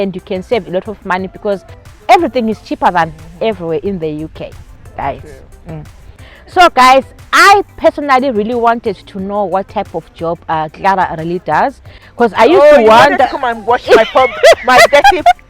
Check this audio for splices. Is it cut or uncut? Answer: uncut